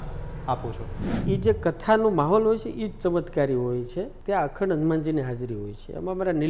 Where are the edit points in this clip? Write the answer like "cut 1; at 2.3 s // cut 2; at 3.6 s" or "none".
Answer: cut 1; at 1.2 s // cut 2; at 4.1 s